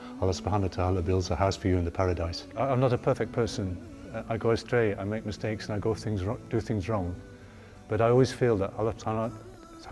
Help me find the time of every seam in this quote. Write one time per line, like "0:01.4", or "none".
0:02.4